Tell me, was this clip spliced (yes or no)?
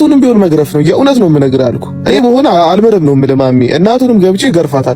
yes